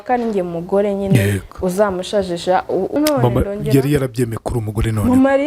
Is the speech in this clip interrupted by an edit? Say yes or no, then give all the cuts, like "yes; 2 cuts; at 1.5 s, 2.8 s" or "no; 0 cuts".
yes; 1 cut; at 2.9 s